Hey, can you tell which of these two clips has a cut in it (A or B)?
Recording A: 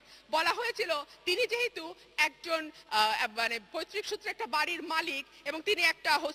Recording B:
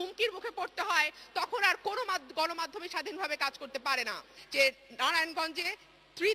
B